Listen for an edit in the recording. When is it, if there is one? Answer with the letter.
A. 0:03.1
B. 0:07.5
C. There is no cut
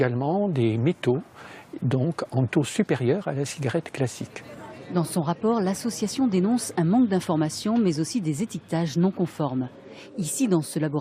C